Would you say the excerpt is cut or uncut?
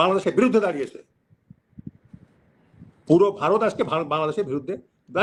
uncut